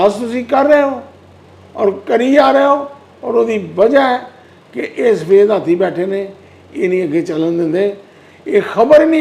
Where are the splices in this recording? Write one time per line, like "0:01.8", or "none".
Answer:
none